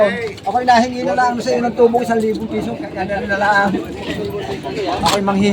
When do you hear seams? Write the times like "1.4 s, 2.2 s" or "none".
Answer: 3.1 s